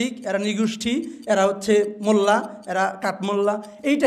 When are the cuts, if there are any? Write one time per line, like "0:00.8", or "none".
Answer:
none